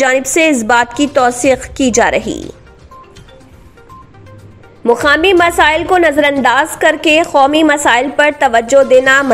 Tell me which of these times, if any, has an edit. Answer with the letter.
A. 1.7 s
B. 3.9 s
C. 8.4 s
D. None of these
D